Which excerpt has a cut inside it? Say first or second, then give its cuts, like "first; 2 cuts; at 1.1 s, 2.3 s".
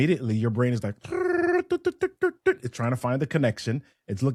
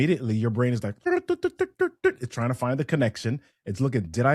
second; 1 cut; at 1.1 s